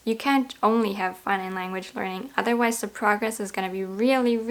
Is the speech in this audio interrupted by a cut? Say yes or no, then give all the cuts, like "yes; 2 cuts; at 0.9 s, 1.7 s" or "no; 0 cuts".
no; 0 cuts